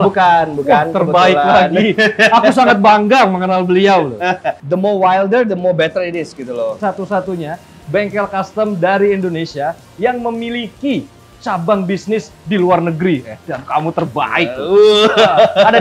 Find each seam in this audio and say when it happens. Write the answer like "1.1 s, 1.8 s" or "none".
4.5 s, 6.8 s